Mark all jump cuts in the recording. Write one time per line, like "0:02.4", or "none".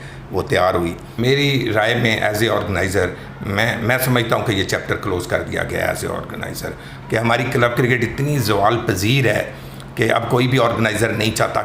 0:01.2
0:06.9